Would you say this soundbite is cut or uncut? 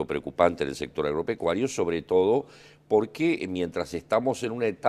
uncut